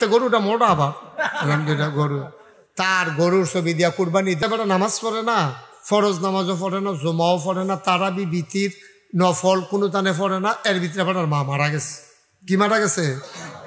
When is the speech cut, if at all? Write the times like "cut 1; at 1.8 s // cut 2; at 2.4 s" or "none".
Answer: cut 1; at 4.4 s